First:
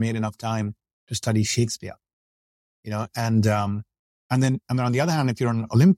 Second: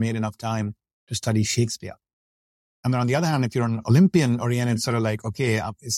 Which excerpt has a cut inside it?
second; 1 cut; at 2.8 s

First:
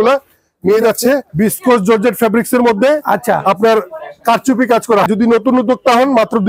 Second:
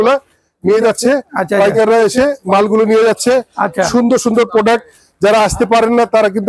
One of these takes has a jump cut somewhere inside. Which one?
first; 2 cuts; at 1.3 s, 5.1 s

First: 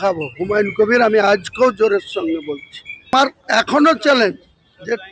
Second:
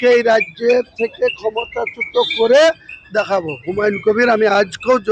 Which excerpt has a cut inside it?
first; 1 cut; at 3.1 s

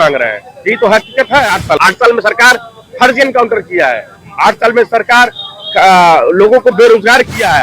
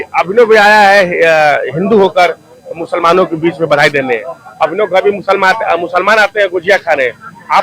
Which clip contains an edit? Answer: first; 1 cut; at 1.8 s

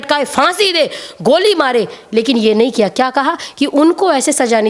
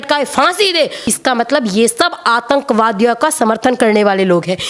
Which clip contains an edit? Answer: second; 1 cut; at 1.1 s

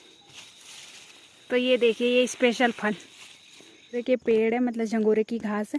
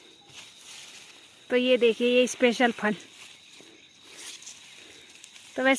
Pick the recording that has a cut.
first; 1 cut; at 4.0 s

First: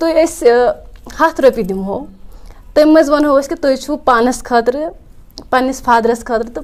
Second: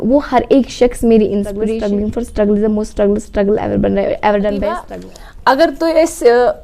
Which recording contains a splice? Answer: second; 2 cuts; at 1.6 s, 4.9 s

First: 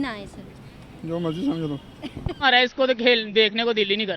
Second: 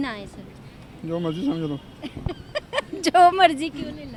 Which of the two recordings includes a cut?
first; 1 cut; at 2.4 s

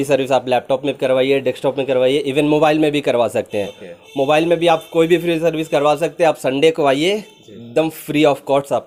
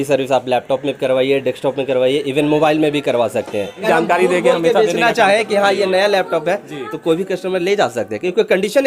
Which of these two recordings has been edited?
second; 1 cut; at 3.8 s

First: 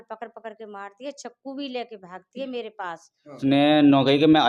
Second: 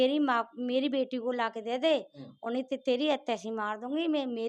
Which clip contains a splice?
first; 1 cut; at 3.3 s

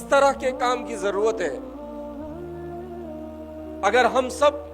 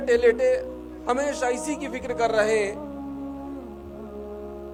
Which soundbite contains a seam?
first; 2 cuts; at 1.6 s, 3.8 s

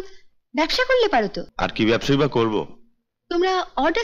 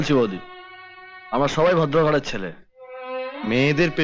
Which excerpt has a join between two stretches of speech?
first; 1 cut; at 1.4 s

